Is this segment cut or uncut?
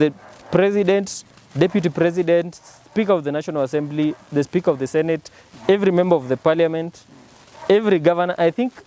uncut